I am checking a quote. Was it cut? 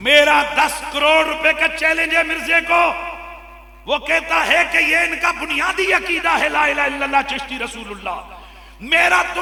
no; 0 cuts

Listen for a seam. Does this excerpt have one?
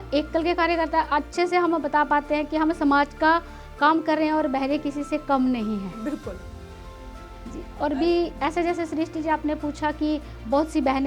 no; 0 cuts

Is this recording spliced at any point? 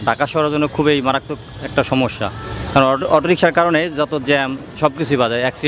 no; 0 cuts

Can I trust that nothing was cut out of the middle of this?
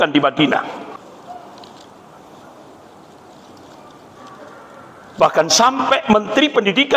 no; 1 cut; at 0.9 s

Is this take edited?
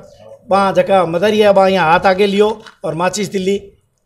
no; 0 cuts

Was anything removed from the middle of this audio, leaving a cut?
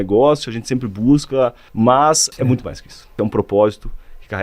yes; 2 cuts; at 1.6 s, 2.6 s

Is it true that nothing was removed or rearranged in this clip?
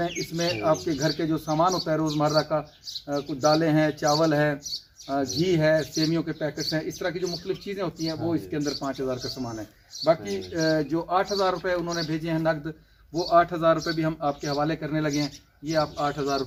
yes; 0 cuts

